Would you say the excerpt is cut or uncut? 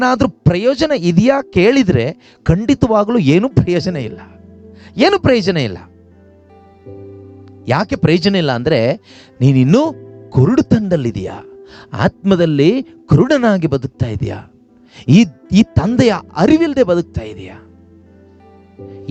uncut